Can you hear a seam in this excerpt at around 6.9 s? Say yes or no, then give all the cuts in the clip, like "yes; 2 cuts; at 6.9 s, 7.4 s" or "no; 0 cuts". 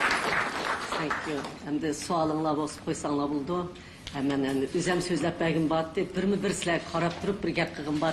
no; 1 cut; at 5.3 s